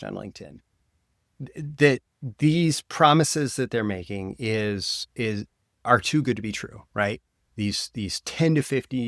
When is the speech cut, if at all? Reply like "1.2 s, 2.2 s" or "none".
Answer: none